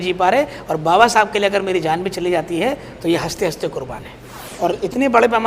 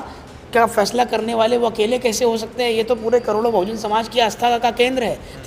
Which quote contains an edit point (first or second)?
first